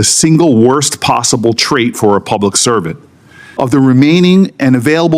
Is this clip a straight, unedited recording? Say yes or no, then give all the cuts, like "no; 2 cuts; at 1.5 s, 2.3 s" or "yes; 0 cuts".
no; 1 cut; at 3.4 s